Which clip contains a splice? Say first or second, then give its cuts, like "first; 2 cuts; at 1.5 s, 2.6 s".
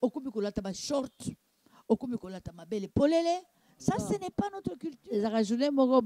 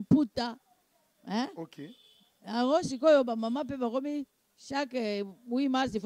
first; 1 cut; at 4.9 s